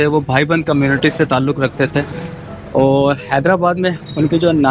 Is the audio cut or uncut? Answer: uncut